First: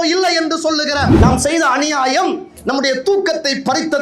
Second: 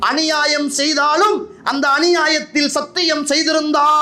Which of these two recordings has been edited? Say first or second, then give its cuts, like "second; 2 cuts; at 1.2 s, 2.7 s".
first; 1 cut; at 1.1 s